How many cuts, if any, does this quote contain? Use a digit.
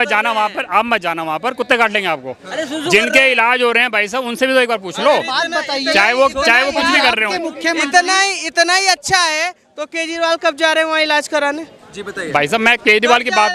0